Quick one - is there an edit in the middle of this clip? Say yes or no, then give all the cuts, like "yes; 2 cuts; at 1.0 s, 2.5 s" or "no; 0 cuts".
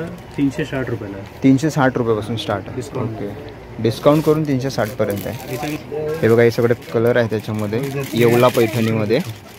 no; 0 cuts